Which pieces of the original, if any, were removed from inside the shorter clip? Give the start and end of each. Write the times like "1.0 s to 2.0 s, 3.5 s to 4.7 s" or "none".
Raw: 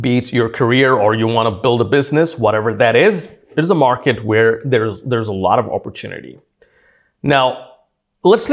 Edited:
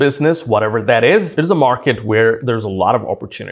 3.2 s to 3.5 s, 4.6 s to 5.0 s